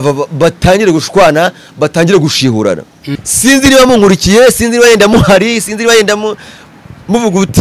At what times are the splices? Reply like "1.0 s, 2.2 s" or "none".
3.2 s